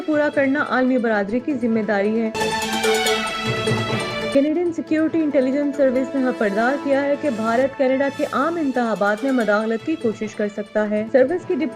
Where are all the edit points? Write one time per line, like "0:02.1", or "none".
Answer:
0:02.4
0:04.3